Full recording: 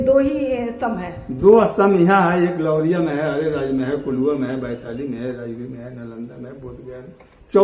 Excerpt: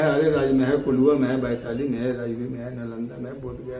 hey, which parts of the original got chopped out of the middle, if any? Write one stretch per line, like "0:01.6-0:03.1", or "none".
none